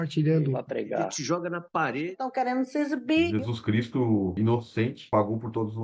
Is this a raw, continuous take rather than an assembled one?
yes; 0 cuts

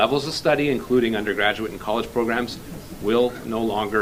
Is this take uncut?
yes; 0 cuts

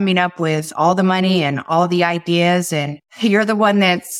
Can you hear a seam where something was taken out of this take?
yes; 1 cut; at 3.0 s

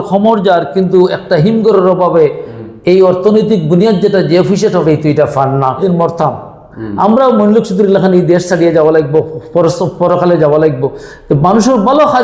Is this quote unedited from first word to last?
no; 1 cut; at 5.8 s

